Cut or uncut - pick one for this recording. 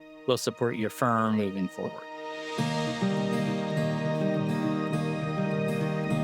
cut